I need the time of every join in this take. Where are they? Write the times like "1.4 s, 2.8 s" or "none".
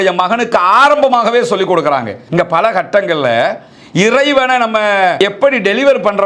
2.2 s, 5.2 s